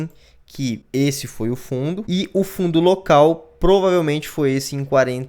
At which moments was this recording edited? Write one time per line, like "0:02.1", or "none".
0:00.8
0:02.0